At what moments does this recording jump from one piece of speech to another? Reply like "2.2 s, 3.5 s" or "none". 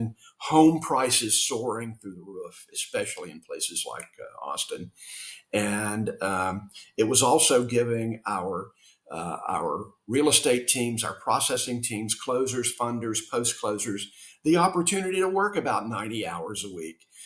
none

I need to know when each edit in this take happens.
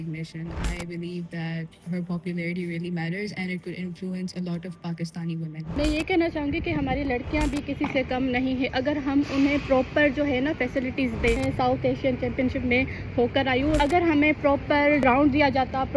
5.6 s, 11.4 s, 13.8 s, 15.0 s

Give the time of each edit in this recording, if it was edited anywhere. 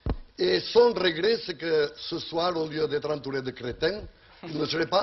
3.6 s

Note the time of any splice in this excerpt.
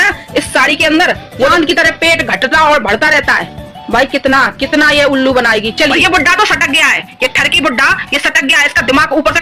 1.5 s, 5.9 s

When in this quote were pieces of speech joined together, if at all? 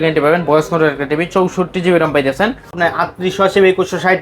2.8 s

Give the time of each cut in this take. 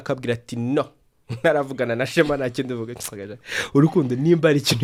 none

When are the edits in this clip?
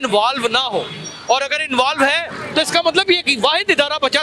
none

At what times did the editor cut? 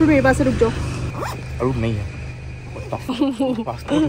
0.9 s

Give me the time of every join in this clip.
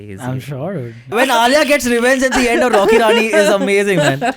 1.1 s

